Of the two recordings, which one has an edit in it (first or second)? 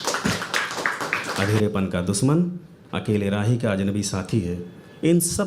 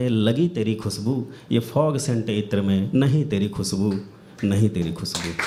first